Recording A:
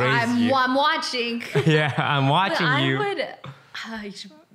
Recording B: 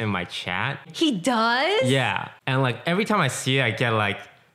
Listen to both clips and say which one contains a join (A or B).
B